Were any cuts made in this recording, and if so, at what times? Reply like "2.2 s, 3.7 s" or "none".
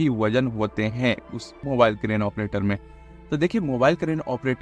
1.5 s